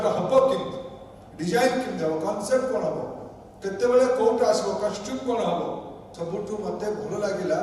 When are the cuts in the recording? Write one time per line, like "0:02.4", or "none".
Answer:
0:06.0